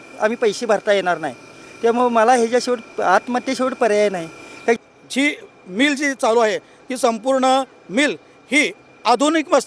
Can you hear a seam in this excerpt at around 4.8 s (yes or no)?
yes